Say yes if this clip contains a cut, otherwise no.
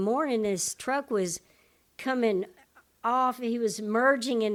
no